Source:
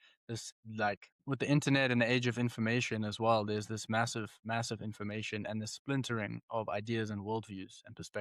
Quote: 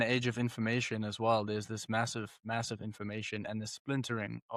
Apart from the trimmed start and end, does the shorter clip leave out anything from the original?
no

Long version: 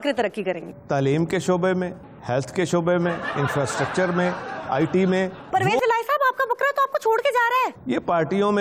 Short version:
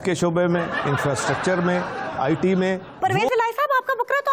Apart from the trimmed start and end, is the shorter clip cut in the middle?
no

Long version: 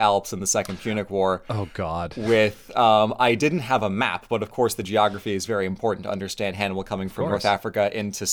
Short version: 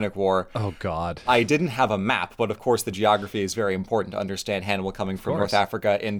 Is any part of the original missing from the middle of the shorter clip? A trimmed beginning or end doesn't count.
yes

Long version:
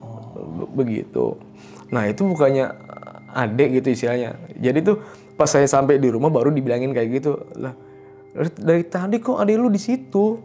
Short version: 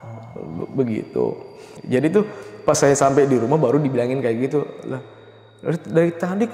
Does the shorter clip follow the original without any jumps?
no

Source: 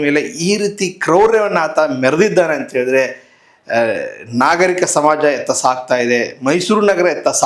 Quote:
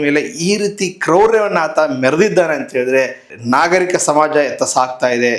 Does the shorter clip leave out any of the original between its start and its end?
yes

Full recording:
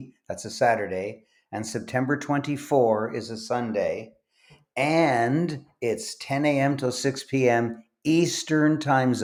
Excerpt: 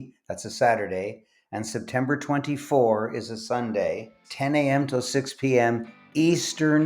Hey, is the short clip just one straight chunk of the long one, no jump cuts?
no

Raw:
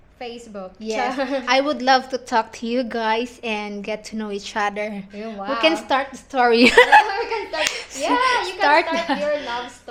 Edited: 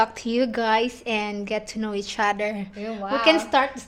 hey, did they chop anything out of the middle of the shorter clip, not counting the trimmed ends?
no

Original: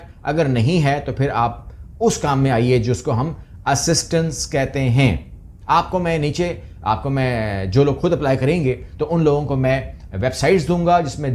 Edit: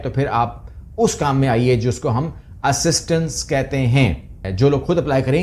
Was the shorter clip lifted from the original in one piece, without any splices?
no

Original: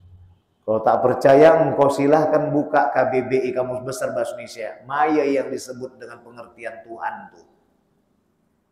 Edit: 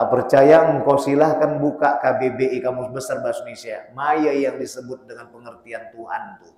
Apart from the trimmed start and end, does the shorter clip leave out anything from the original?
no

